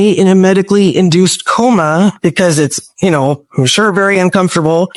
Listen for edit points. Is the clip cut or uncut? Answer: uncut